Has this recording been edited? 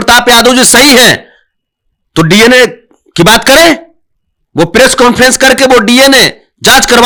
no; 0 cuts

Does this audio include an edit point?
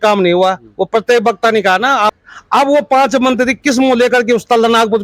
yes; 1 cut; at 2.2 s

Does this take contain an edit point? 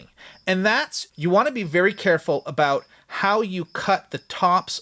no; 0 cuts

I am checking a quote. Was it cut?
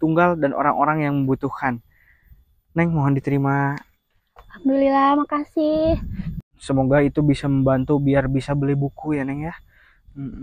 yes; 1 cut; at 6.5 s

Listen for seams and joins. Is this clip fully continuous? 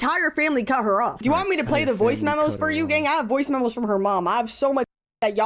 no; 2 cuts; at 1.2 s, 3.3 s

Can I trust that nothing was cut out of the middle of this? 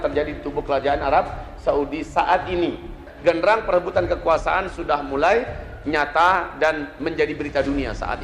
no; 1 cut; at 3.0 s

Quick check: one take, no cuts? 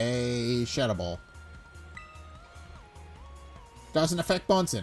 no; 2 cuts; at 1.2 s, 3.3 s

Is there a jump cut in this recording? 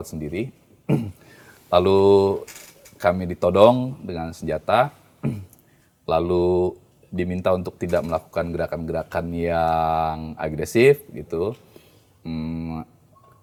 no; 0 cuts

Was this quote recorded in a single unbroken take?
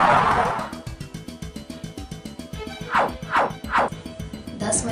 no; 3 cuts; at 0.7 s, 2.9 s, 4.0 s

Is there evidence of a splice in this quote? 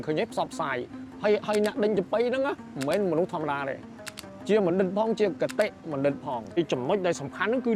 no; 0 cuts

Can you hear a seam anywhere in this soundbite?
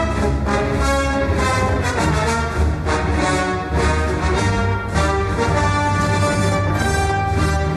yes; 1 cut; at 5.8 s

